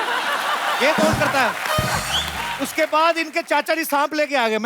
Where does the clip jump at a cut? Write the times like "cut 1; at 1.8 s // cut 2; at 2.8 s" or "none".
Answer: cut 1; at 2.5 s